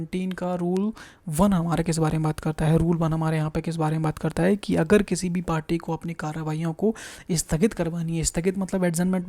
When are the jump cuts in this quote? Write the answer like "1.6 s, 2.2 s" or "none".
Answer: none